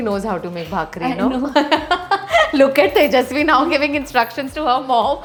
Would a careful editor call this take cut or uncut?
uncut